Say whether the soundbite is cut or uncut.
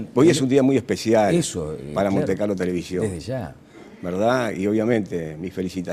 uncut